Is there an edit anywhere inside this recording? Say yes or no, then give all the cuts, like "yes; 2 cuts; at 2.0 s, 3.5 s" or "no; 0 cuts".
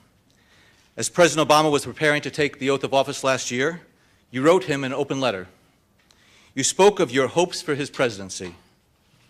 yes; 1 cut; at 8.1 s